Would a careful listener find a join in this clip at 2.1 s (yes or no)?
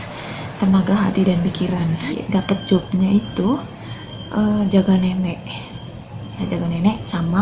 yes